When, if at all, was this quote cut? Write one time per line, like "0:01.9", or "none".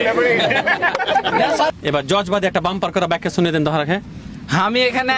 0:01.7